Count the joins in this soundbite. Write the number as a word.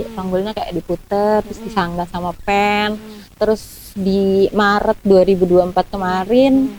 zero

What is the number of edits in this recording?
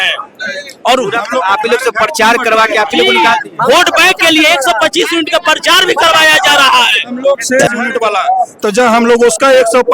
one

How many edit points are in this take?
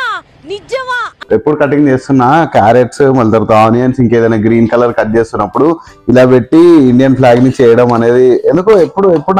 one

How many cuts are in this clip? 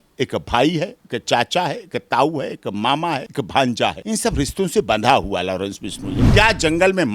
three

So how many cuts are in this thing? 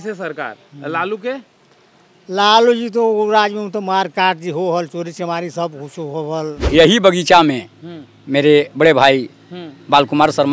one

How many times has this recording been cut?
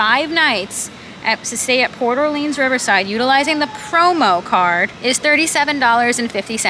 one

